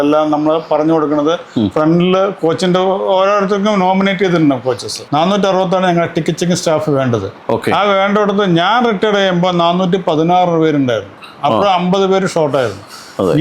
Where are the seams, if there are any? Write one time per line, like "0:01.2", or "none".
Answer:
0:05.0